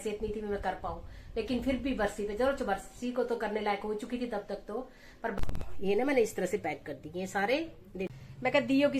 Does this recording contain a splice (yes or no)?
yes